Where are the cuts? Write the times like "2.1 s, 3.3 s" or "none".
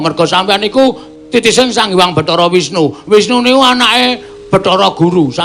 1.9 s